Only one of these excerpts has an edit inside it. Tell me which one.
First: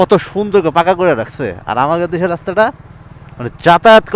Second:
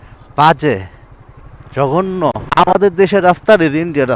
second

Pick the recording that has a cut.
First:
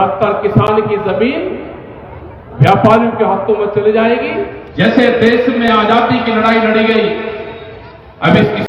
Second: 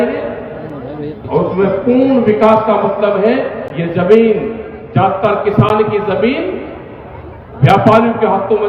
first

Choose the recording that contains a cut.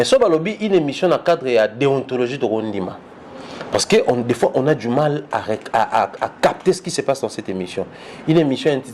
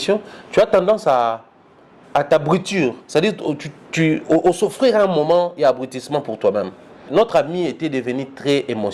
second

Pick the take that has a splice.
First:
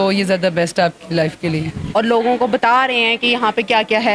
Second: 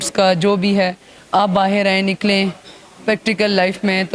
first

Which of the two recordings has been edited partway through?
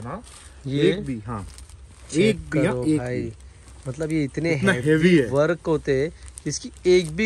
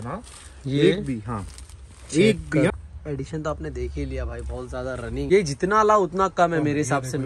second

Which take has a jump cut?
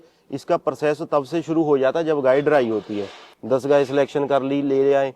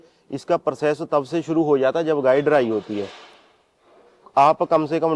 first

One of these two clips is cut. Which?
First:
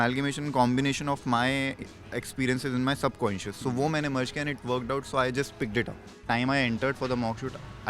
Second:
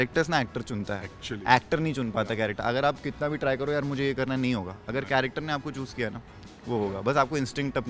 first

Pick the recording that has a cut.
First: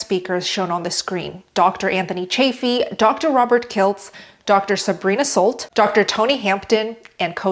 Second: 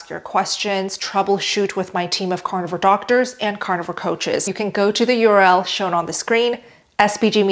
second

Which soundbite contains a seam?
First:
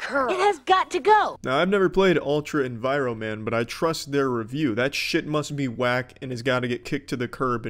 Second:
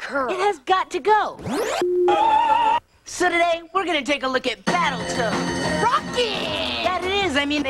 second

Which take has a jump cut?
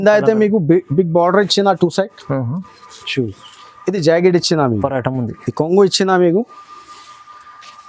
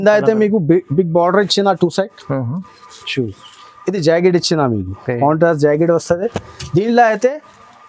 first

